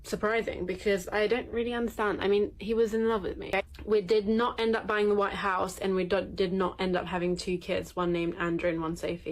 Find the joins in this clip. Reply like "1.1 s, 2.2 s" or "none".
3.5 s